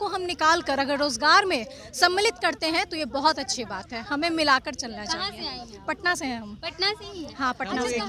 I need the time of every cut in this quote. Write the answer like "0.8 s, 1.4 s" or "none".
none